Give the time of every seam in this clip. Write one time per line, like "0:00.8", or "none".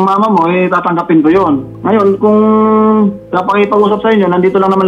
0:01.7
0:03.3